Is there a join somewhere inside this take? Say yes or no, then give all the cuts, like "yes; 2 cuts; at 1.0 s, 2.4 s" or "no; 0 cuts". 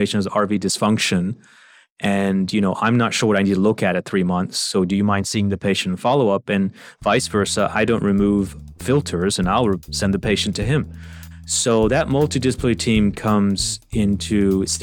no; 0 cuts